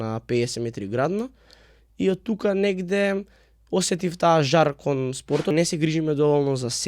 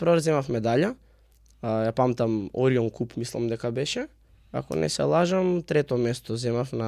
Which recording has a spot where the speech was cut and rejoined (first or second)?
first